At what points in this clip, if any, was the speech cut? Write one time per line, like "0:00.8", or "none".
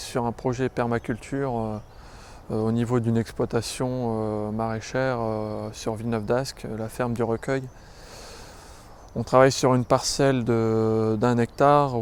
none